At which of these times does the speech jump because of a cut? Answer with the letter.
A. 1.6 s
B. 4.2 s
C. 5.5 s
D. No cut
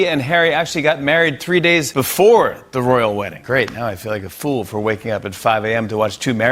D